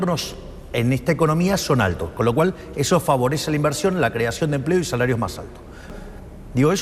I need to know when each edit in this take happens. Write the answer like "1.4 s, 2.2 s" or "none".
5.9 s